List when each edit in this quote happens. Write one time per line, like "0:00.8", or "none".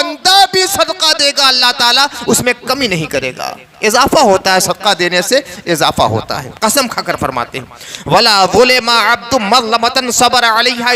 none